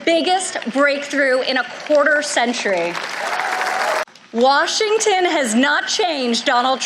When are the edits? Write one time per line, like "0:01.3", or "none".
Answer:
0:04.0